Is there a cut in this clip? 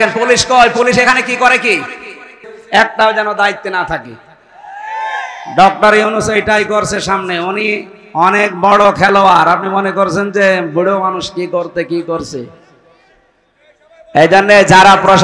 yes; 1 cut; at 2.6 s

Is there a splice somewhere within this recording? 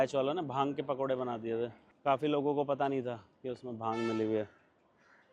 yes; 1 cut; at 1.8 s

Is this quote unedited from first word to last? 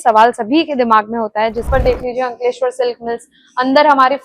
no; 1 cut; at 1.7 s

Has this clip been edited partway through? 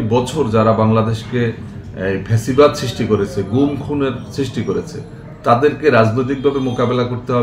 no; 0 cuts

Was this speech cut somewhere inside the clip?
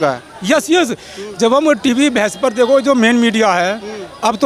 no; 0 cuts

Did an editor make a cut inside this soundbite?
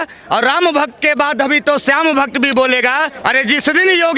yes; 1 cut; at 3.1 s

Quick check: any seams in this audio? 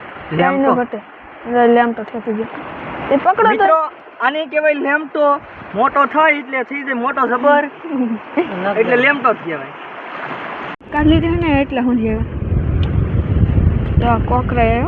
no; 0 cuts

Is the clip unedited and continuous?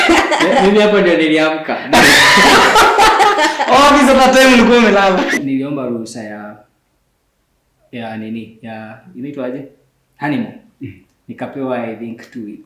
no; 1 cut; at 5.4 s

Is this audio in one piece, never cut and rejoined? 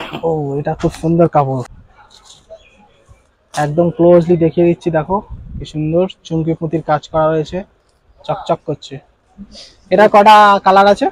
no; 1 cut; at 1.8 s

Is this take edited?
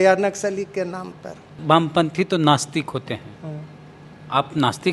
yes; 1 cut; at 1.6 s

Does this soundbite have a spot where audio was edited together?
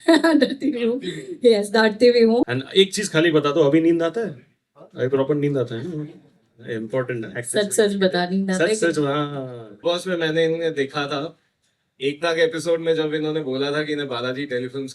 yes; 2 cuts; at 2.5 s, 9.6 s

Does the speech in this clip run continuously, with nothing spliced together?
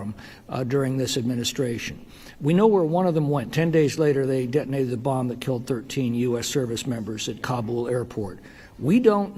yes; 0 cuts

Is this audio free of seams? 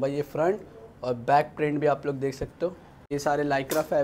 no; 1 cut; at 3.1 s

